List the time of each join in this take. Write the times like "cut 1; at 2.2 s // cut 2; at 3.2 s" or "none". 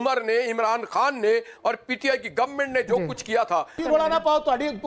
cut 1; at 3.8 s